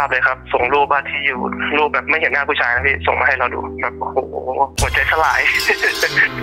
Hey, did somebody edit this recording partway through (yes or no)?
no